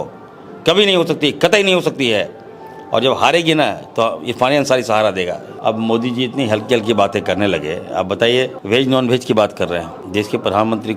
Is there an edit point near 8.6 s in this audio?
yes; 3 cuts; at 5.5 s, 8.6 s, 10.0 s

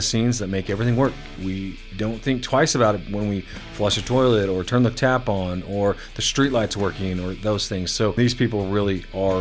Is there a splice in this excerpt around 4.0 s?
no; 2 cuts; at 1.3 s, 8.2 s

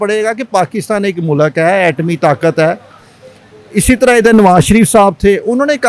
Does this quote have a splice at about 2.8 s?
no; 0 cuts

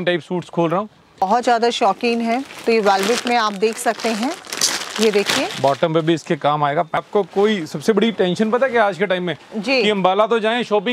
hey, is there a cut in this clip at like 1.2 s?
yes; 2 cuts; at 1.2 s, 7.1 s

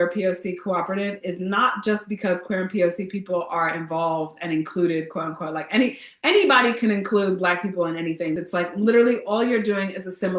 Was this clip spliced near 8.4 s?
yes; 1 cut; at 8.4 s

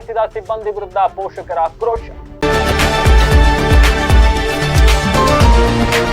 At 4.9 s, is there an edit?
no; 1 cut; at 2.2 s

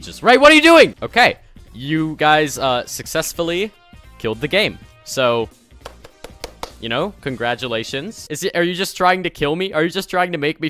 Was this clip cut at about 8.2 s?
yes; 2 cuts; at 1.0 s, 8.2 s

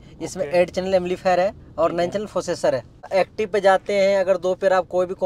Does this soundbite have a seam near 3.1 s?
yes; 1 cut; at 3.1 s

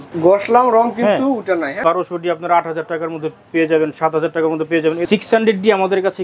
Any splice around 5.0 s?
yes; 2 cuts; at 1.8 s, 5.0 s

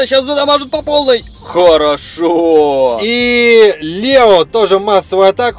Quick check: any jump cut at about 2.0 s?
no; 0 cuts

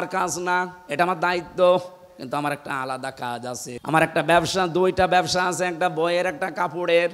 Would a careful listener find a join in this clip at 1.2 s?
no; 1 cut; at 3.7 s

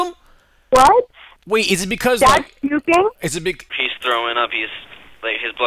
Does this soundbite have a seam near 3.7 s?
yes; 1 cut; at 3.7 s

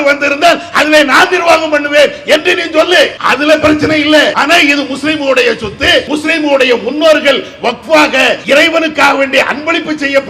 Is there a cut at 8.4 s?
yes; 4 cuts; at 3.2 s, 4.4 s, 6.1 s, 8.4 s

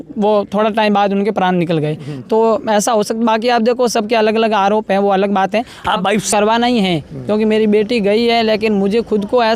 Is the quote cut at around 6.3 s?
yes; 1 cut; at 6.3 s

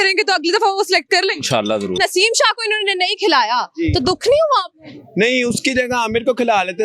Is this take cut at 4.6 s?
no; 1 cut; at 2.0 s

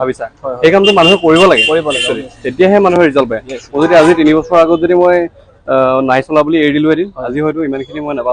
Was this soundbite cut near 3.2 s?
no; 0 cuts

